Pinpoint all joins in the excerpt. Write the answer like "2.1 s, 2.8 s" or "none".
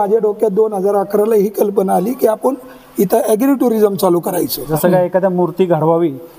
4.6 s